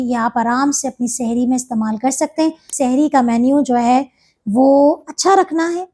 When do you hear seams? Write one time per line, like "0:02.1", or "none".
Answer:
0:02.7

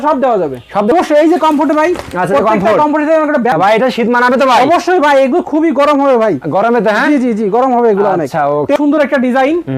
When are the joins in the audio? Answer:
0:00.9
0:03.5
0:08.8

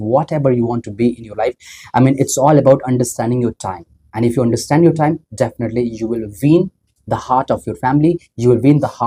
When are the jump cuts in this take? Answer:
none

